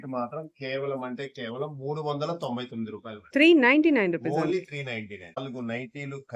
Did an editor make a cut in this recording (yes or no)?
yes